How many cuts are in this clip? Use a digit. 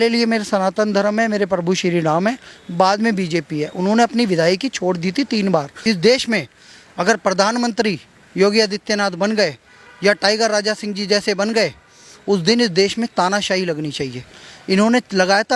1